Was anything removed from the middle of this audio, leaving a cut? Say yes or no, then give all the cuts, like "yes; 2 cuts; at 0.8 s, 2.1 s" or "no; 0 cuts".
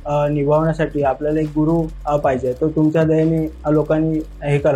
no; 0 cuts